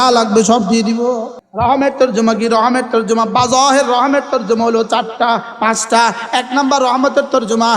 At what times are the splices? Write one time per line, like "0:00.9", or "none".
0:01.4